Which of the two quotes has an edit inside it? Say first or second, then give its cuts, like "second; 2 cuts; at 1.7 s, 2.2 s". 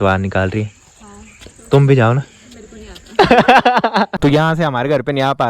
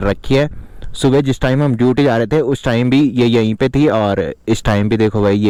first; 1 cut; at 4.1 s